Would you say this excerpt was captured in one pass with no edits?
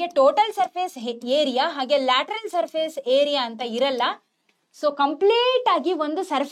yes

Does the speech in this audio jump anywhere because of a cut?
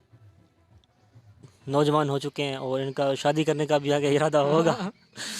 yes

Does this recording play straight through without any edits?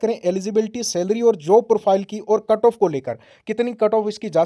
yes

